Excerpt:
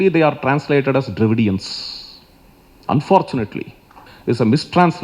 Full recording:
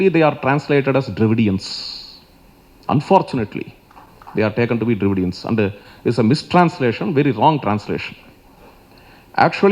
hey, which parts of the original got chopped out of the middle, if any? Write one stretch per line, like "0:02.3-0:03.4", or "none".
0:04.1-0:05.9